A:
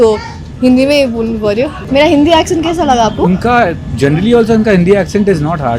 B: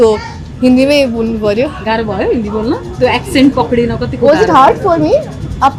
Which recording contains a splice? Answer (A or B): A